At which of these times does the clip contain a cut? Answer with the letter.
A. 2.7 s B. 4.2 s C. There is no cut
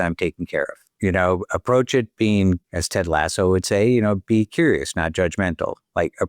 A